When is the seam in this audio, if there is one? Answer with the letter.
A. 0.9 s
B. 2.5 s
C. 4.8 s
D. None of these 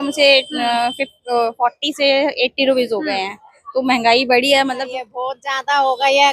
C